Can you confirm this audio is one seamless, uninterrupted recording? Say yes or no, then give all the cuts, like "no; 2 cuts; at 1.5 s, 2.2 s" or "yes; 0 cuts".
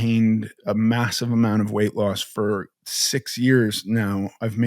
no; 1 cut; at 2.7 s